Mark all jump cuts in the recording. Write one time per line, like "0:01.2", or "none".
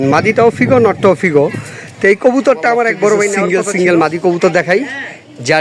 0:03.4

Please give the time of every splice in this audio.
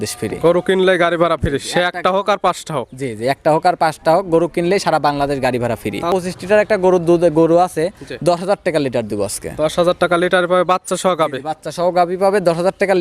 0:06.1

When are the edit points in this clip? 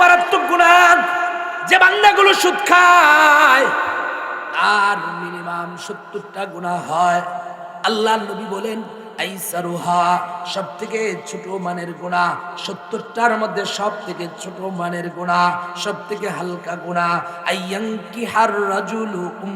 0:01.5

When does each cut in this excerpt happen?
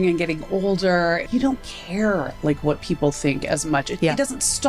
0:01.2
0:03.9

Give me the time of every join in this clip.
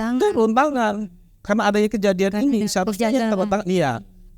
none

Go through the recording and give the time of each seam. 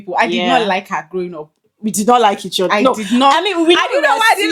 none

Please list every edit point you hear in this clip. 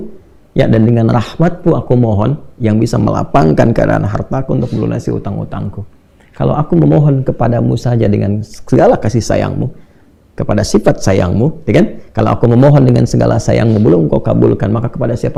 none

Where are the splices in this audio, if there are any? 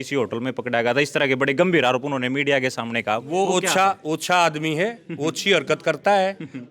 none

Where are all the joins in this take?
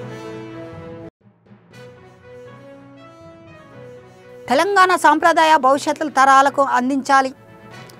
0:00.9

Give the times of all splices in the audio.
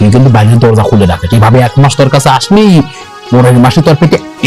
none

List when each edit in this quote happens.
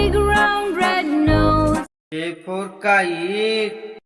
0:02.0

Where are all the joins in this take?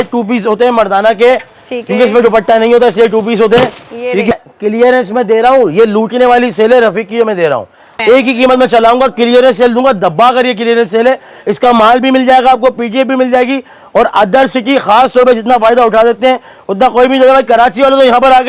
0:04.3
0:07.9

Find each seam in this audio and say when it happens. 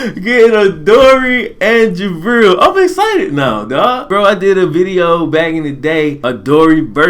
0:04.1
0:06.2

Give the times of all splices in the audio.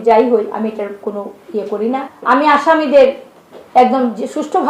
0:02.0

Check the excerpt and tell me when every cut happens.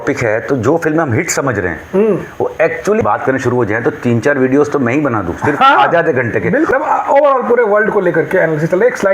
0:03.0
0:06.7

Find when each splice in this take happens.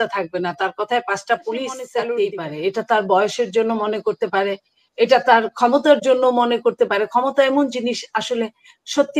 0:01.9

